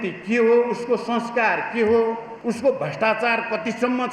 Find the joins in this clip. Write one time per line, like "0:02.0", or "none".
0:02.3

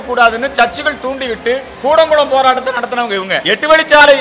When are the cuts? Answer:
0:01.7
0:03.4

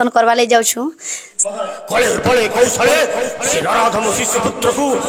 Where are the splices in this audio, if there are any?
0:01.3

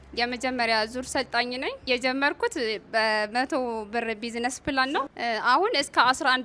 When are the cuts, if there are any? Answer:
0:01.8

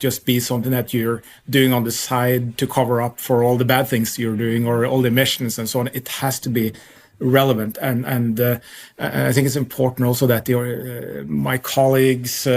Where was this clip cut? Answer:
none

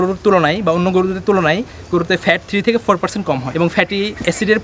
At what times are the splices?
none

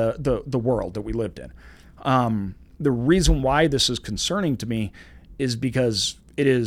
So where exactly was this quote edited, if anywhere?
none

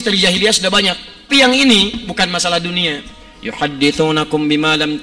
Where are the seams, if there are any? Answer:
0:01.3

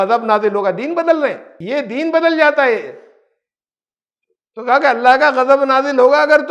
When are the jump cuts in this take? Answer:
0:01.6

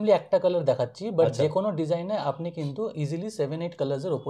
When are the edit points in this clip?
none

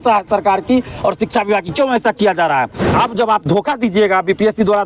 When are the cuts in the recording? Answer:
0:02.9

